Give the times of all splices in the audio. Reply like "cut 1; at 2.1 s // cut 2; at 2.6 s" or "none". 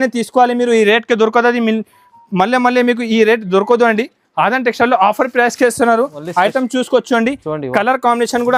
none